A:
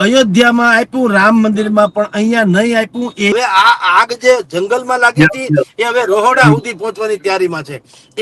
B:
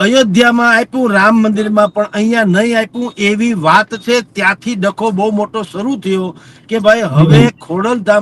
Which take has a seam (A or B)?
A